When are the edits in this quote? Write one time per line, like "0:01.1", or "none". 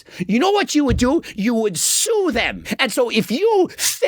0:02.6